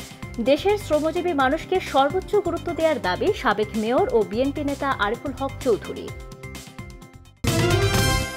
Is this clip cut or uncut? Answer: cut